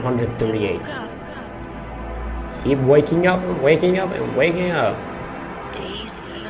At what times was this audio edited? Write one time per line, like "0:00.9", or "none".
none

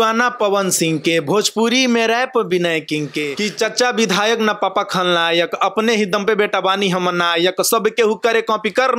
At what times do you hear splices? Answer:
0:03.3

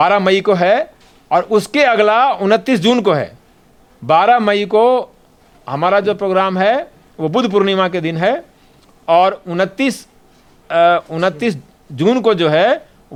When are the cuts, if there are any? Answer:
none

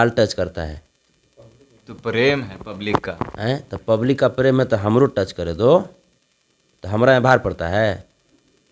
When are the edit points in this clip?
none

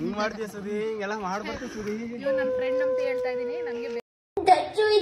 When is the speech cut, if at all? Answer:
none

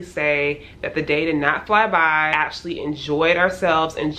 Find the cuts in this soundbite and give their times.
0:02.3

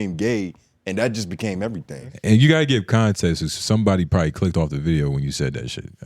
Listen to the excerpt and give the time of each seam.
0:02.1

